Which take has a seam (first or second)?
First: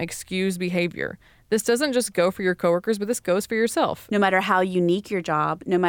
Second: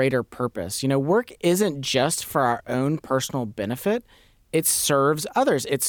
first